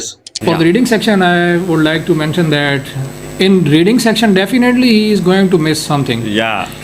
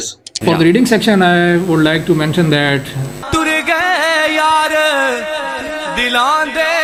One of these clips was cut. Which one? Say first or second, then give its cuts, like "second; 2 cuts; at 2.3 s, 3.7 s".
first; 1 cut; at 3.2 s